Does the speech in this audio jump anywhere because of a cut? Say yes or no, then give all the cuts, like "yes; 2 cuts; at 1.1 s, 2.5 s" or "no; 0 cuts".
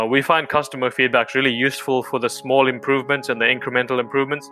no; 0 cuts